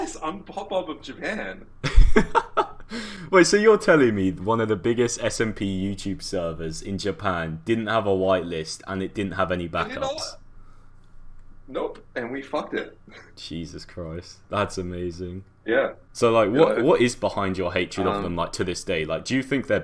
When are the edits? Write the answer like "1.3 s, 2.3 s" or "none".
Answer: 16.0 s